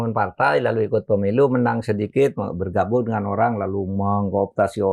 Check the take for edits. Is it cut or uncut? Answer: uncut